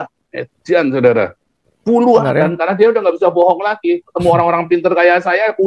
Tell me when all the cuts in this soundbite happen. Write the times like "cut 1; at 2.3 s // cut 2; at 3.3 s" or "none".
cut 1; at 2.2 s